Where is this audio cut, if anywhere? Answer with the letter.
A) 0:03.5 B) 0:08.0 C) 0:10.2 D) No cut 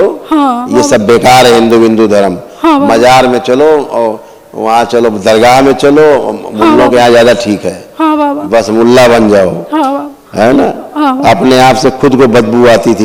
D